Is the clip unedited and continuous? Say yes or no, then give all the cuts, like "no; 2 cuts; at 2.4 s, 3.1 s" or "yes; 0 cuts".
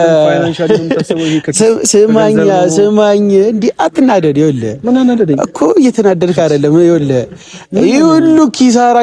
yes; 0 cuts